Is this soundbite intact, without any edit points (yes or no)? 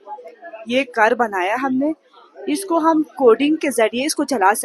yes